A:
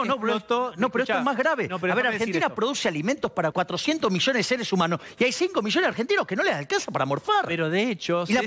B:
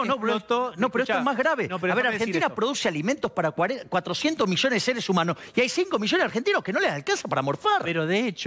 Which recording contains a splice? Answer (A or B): A